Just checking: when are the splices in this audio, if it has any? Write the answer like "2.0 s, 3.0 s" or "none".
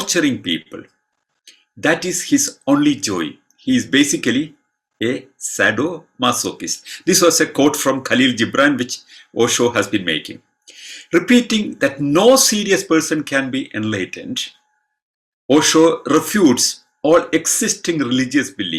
none